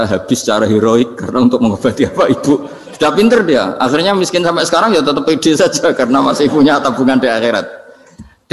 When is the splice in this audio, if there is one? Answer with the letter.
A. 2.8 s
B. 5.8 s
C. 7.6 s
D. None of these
D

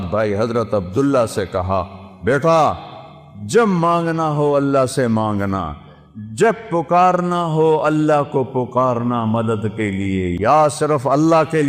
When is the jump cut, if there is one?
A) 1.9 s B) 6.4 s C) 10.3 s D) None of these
C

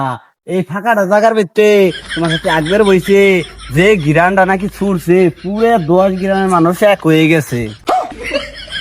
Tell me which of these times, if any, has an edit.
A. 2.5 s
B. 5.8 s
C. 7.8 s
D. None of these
C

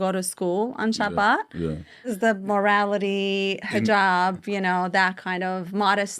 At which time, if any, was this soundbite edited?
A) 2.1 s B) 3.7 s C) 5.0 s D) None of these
A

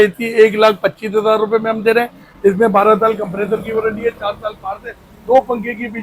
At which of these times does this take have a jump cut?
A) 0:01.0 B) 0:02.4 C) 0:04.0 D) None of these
D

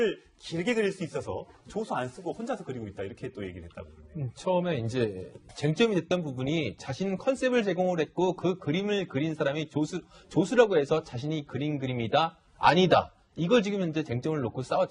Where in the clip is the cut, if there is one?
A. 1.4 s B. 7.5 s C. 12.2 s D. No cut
C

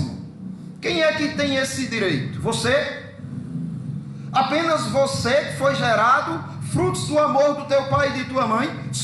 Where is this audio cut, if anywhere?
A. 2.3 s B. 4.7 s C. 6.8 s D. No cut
A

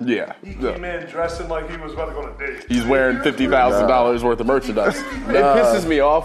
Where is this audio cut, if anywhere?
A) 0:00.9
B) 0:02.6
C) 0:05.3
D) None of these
C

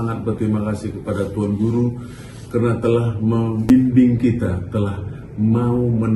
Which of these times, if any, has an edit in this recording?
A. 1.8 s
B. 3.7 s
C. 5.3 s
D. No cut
B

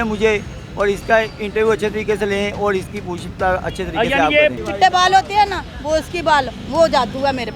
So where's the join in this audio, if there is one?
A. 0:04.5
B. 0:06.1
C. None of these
A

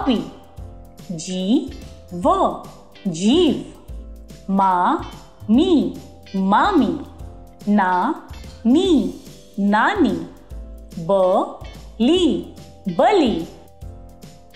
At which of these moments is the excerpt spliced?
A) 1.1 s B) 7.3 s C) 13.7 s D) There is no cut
C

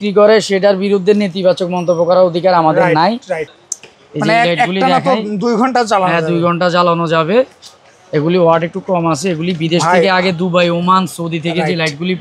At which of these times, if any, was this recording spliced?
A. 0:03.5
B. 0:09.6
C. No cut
A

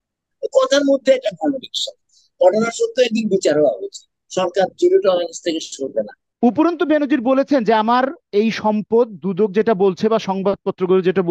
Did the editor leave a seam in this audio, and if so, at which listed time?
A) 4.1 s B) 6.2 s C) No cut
B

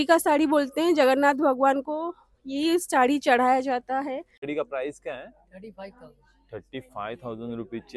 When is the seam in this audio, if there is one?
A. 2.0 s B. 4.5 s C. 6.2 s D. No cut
B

